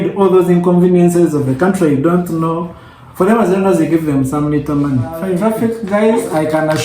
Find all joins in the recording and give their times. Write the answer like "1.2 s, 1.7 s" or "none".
5.4 s